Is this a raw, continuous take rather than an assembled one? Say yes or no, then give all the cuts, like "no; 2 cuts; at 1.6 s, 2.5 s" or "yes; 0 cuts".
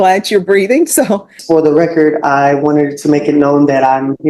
no; 1 cut; at 1.3 s